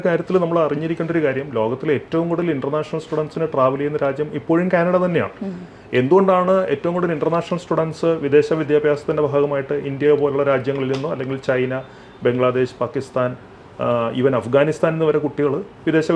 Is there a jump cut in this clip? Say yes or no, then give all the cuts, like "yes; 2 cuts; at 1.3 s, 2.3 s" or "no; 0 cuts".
no; 0 cuts